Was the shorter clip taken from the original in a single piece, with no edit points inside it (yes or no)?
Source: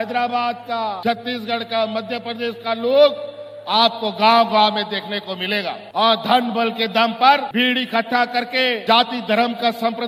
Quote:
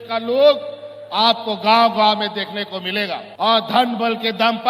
yes